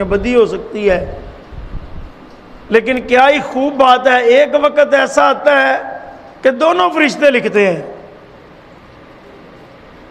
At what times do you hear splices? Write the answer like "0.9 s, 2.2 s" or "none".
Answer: none